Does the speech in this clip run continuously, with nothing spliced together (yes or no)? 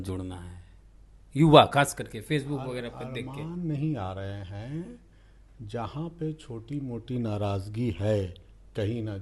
yes